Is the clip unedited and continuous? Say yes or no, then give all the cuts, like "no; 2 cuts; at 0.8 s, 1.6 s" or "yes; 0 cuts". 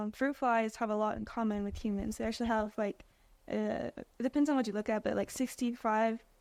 yes; 0 cuts